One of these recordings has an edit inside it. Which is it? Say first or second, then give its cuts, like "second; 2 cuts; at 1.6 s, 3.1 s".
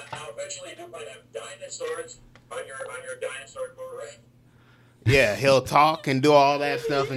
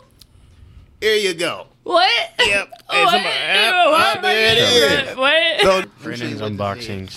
second; 1 cut; at 5.8 s